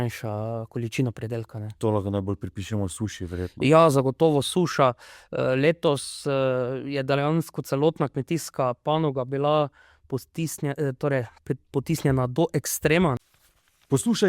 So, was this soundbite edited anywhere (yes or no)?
yes